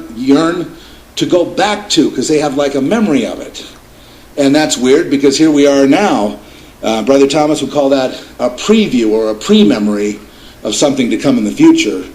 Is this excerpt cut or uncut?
cut